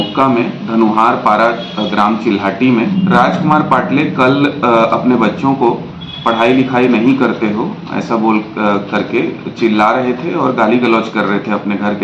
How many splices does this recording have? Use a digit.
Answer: 1